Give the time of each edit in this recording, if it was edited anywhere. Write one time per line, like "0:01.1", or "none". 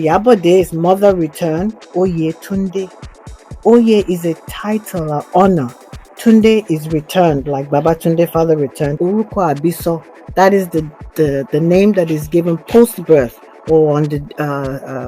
0:01.8
0:08.9